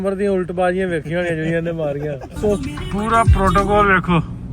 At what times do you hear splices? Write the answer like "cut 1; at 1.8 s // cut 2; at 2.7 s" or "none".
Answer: cut 1; at 2.6 s